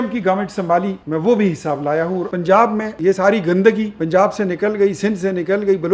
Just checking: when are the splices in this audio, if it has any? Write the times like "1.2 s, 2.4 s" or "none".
1.0 s, 2.3 s, 3.0 s, 3.9 s